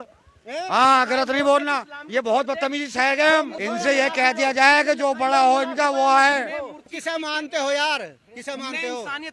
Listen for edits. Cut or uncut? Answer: cut